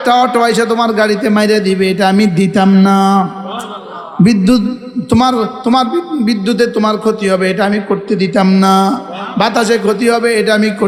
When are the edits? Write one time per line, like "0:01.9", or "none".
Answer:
none